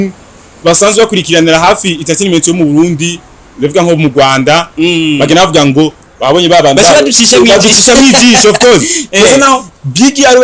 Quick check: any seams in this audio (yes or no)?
no